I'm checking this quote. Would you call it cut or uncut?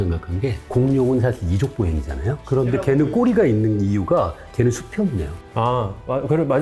uncut